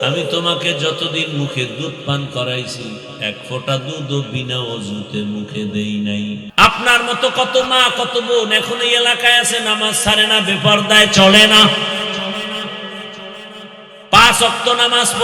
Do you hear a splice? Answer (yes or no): yes